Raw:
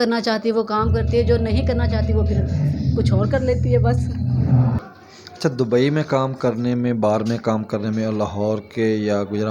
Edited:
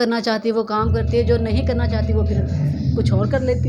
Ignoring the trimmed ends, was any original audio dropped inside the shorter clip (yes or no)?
no